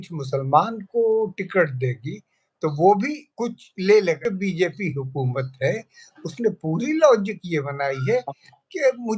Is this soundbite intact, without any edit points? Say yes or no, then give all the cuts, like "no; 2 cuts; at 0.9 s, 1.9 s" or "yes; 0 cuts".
no; 2 cuts; at 3.2 s, 4.2 s